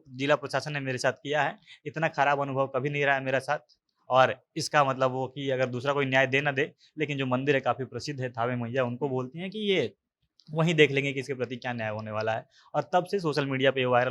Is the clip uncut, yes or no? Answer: yes